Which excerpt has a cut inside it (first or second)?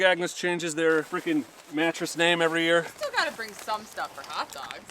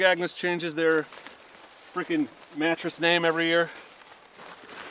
first